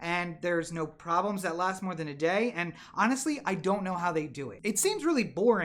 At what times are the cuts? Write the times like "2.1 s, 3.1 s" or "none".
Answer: 4.5 s